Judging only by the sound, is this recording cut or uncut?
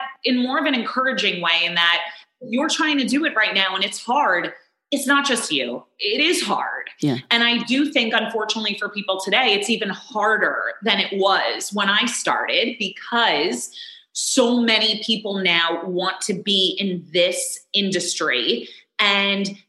uncut